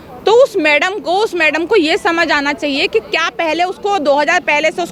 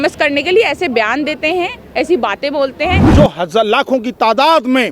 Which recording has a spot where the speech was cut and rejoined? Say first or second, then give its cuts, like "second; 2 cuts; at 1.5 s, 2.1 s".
second; 1 cut; at 3.0 s